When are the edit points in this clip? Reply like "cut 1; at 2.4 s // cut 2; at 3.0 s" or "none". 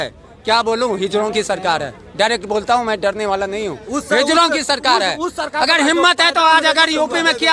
none